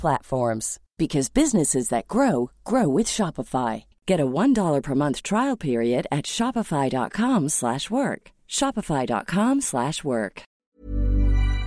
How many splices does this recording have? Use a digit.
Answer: 1